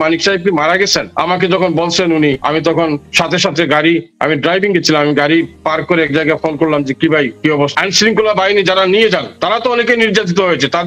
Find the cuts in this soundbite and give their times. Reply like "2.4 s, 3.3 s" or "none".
1.1 s, 2.8 s, 7.7 s, 9.3 s